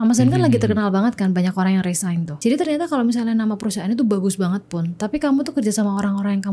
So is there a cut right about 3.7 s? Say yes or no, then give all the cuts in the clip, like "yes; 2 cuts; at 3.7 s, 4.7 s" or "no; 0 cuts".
no; 1 cut; at 2.3 s